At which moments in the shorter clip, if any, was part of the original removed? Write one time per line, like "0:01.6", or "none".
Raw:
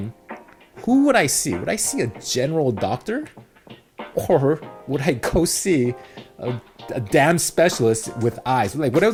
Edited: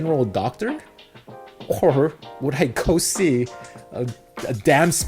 none

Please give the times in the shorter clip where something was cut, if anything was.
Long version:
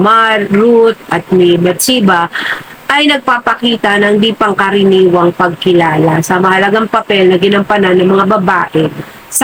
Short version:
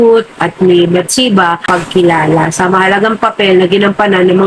0:01.7

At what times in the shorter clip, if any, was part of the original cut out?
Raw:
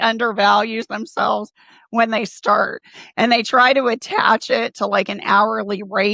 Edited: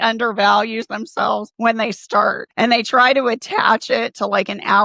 0:01.5
0:02.4

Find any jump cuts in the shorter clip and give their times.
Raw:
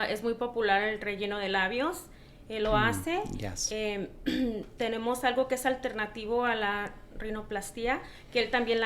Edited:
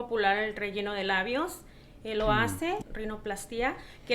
0:02.9

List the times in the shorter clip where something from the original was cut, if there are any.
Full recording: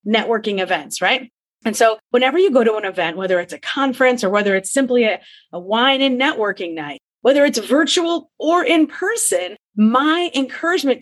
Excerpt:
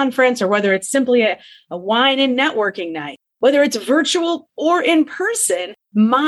none

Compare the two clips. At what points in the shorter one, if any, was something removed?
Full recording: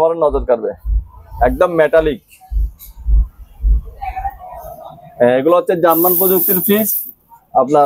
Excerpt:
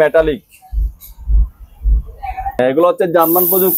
0:02.6

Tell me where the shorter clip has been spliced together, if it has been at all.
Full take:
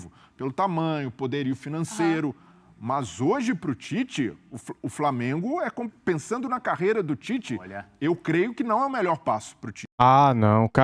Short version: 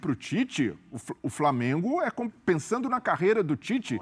none

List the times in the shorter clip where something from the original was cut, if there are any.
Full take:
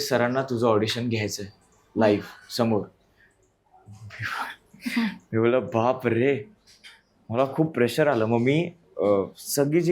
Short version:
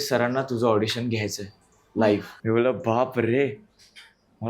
0:02.3

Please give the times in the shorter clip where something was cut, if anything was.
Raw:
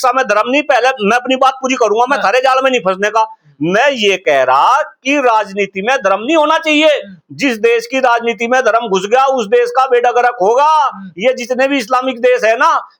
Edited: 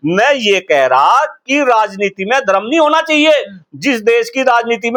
none

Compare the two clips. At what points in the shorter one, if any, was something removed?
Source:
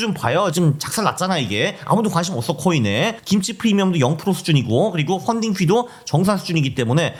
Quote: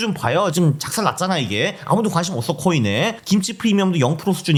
none

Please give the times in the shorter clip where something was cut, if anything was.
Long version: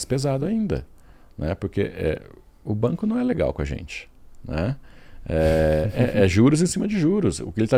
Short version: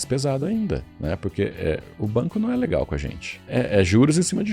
0:00.9
0:01.9
0:03.5

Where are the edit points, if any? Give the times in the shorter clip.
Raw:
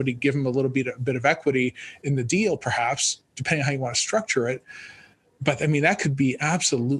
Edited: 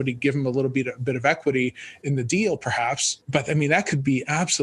0:03.1

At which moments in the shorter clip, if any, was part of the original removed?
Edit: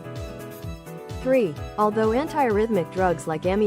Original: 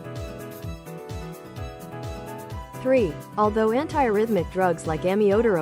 0:01.2

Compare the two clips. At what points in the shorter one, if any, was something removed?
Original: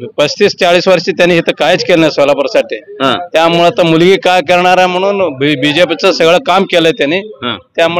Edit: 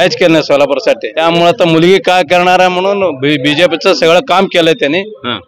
0:01.1

